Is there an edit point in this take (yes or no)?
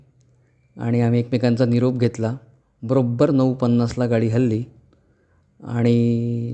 no